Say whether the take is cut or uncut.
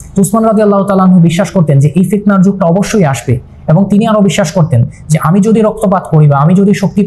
uncut